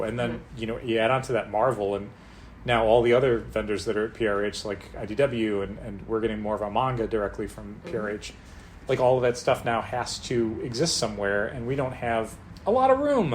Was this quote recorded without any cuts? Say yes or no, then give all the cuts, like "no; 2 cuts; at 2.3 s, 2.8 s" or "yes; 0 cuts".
no; 1 cut; at 12.4 s